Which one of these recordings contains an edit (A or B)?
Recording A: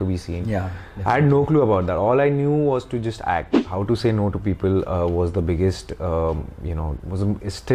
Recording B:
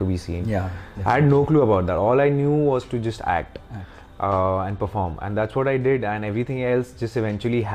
A